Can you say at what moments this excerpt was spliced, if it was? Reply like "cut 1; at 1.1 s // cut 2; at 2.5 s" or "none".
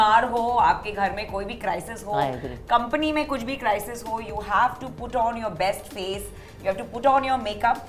none